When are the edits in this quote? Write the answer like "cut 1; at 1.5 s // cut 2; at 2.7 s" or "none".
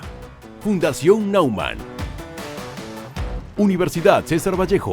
cut 1; at 3.5 s